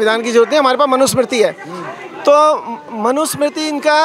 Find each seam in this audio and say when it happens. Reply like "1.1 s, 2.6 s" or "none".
none